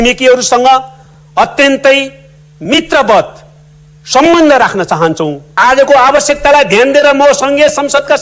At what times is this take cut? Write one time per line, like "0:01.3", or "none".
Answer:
0:05.6